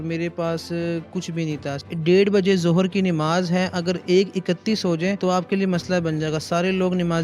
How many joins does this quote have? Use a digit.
2